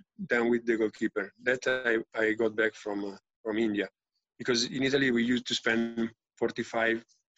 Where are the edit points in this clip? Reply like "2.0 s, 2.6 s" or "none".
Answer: none

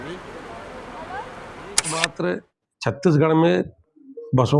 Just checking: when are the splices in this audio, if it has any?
1.8 s

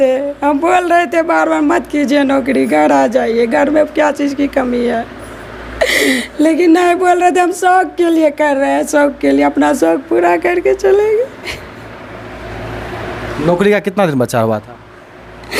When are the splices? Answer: none

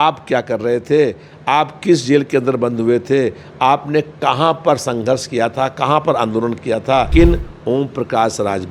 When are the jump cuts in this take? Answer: 7.1 s

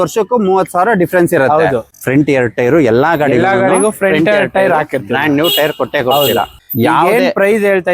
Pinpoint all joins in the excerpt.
1.9 s, 6.6 s

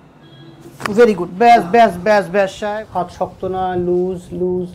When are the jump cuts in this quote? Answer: 2.6 s

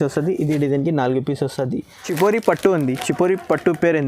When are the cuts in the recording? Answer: 2.0 s

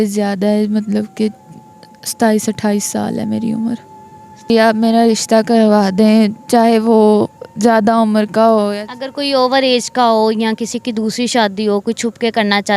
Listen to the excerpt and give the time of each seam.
4.5 s

